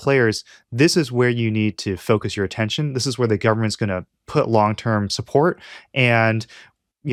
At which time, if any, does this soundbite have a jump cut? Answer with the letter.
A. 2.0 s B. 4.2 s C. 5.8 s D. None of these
D